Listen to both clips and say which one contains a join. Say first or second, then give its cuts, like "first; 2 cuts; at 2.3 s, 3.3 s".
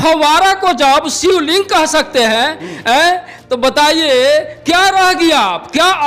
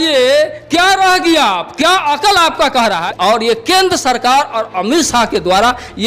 second; 1 cut; at 3.1 s